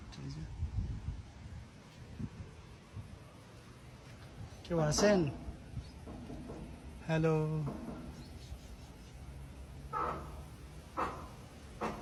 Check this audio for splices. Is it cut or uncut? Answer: uncut